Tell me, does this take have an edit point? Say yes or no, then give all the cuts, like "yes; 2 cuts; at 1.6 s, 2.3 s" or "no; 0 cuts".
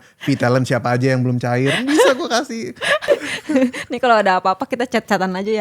yes; 1 cut; at 3.0 s